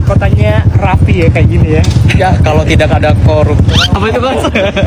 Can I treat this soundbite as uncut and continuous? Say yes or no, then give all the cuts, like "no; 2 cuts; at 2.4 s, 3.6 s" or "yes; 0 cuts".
yes; 0 cuts